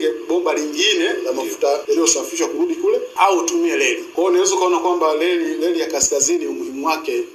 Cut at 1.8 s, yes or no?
yes